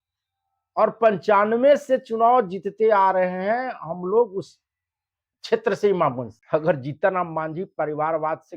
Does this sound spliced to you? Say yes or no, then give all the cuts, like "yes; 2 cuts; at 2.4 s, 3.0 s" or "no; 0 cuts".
yes; 1 cut; at 6.3 s